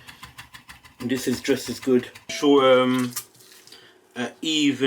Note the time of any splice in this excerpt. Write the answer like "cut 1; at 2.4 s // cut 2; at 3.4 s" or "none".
cut 1; at 2.3 s